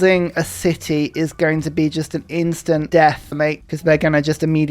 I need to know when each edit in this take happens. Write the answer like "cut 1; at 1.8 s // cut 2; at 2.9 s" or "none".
cut 1; at 2.9 s